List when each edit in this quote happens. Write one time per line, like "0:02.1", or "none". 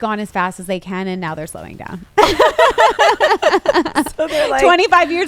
none